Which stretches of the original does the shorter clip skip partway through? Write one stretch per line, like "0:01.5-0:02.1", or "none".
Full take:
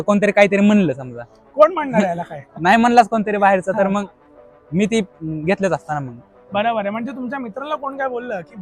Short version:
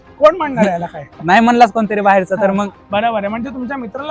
0:04.1-0:06.4